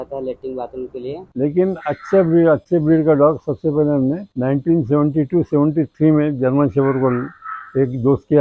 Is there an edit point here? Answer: yes; 1 cut; at 1.3 s

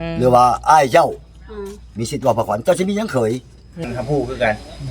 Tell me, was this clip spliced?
yes; 1 cut; at 3.9 s

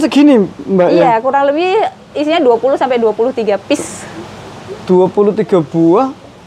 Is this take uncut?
yes; 0 cuts

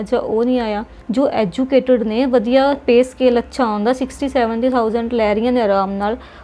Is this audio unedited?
no; 1 cut; at 0.9 s

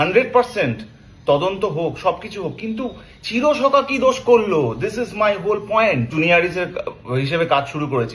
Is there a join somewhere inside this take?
yes; 1 cut; at 6.1 s

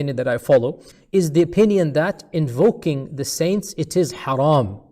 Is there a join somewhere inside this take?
yes; 1 cut; at 0.9 s

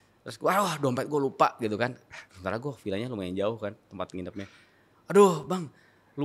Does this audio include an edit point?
no; 0 cuts

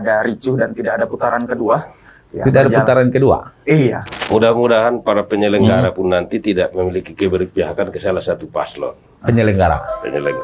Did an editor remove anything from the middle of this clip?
yes; 1 cut; at 4.1 s

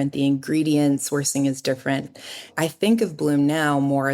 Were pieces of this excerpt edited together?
yes; 1 cut; at 2.4 s

